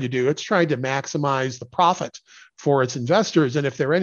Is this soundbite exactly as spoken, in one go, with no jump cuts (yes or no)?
yes